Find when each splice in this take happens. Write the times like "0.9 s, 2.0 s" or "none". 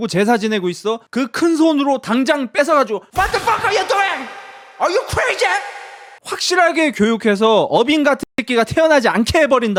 none